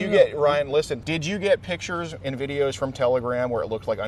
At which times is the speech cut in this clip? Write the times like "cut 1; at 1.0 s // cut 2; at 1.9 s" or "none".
cut 1; at 1.0 s